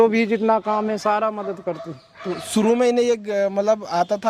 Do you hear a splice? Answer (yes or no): no